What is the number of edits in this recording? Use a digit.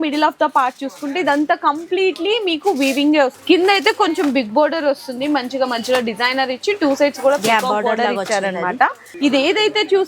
2